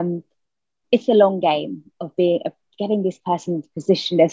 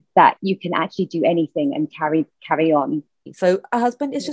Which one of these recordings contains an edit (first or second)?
second